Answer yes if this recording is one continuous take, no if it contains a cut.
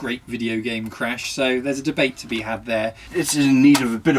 no